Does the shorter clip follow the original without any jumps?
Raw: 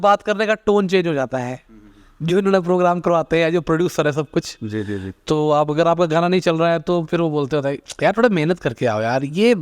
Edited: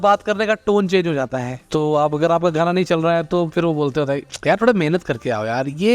no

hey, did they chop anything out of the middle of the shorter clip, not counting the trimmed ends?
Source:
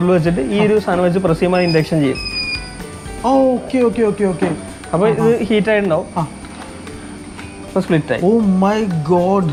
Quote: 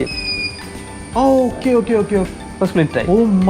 yes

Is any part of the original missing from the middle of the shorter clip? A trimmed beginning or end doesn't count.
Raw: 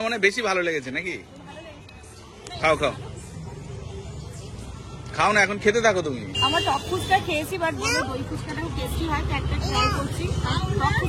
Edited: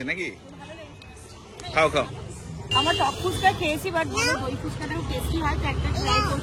yes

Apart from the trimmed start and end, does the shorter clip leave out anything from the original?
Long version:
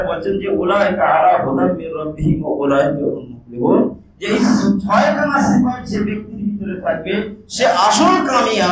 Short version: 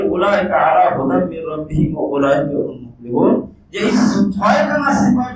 no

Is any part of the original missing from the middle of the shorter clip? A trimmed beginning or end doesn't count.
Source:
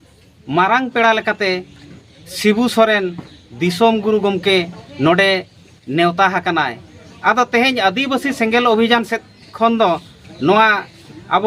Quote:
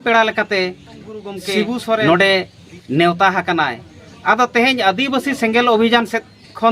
yes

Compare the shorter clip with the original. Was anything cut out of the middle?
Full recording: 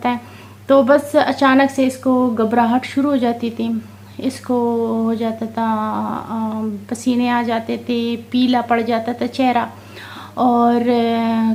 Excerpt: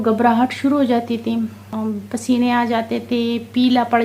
yes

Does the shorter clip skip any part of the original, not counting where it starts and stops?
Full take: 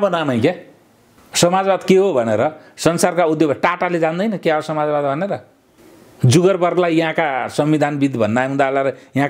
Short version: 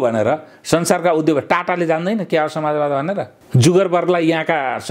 yes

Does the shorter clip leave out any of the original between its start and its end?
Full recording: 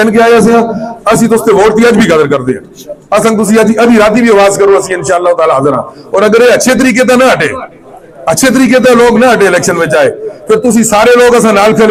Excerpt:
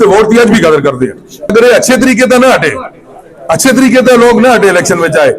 yes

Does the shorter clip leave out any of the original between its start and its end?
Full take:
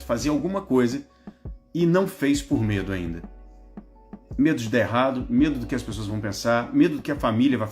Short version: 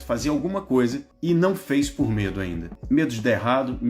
yes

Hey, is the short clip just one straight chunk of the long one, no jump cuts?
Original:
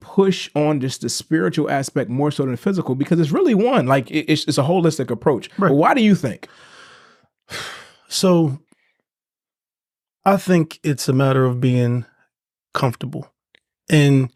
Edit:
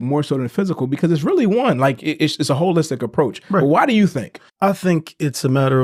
no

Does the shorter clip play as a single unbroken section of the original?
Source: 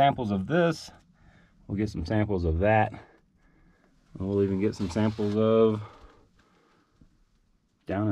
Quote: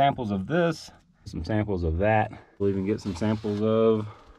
no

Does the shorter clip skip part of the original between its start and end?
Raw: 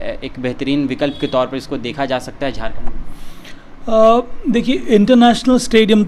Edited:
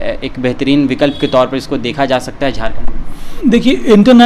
yes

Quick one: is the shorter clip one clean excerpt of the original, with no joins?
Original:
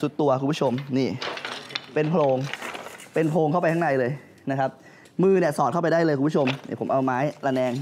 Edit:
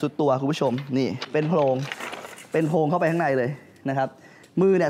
no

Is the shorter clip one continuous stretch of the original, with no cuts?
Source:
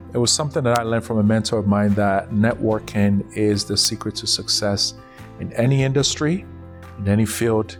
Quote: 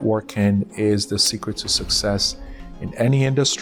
yes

